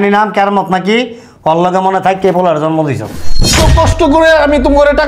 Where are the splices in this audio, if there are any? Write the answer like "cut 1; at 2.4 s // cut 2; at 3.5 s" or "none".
cut 1; at 3.4 s